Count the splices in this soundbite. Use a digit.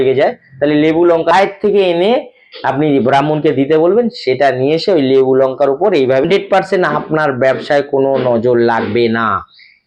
2